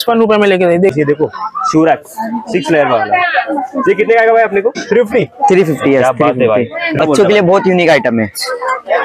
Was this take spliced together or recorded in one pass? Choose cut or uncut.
cut